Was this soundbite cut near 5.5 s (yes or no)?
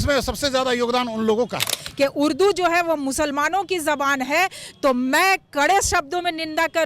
no